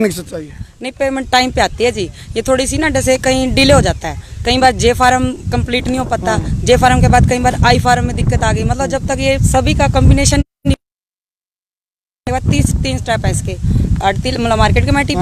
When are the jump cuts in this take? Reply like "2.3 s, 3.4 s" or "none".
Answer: none